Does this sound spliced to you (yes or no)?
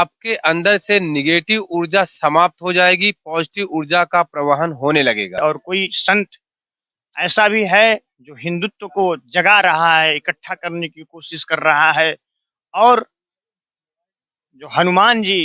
yes